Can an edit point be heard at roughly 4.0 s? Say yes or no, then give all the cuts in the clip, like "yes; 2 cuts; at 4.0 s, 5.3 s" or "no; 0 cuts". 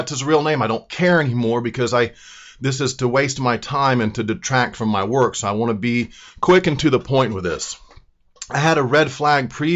no; 1 cut; at 6.8 s